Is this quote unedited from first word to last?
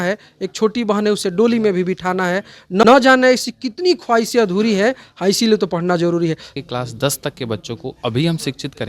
no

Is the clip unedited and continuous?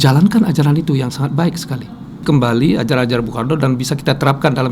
no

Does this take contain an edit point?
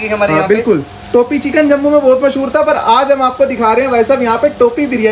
no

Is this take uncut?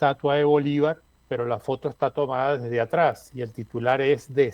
no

